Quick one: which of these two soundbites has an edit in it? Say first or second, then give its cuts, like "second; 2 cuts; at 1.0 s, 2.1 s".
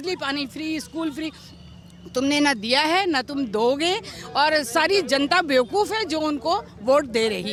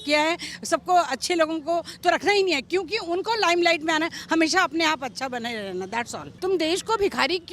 second; 1 cut; at 6.3 s